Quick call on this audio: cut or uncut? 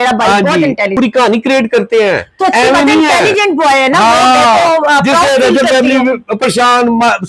cut